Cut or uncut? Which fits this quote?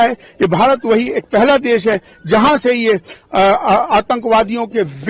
uncut